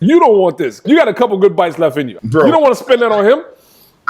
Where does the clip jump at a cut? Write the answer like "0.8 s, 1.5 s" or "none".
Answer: 0.8 s, 2.1 s

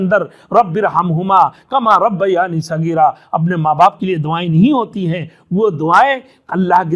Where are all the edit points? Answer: none

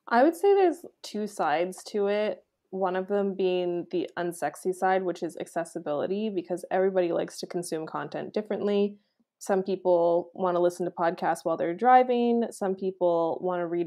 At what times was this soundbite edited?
0.9 s

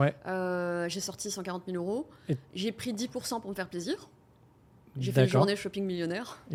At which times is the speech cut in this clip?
none

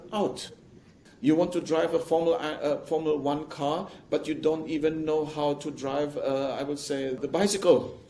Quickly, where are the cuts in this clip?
1.0 s, 7.2 s

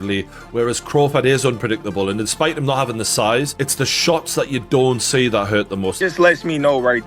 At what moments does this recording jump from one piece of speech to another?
6.0 s

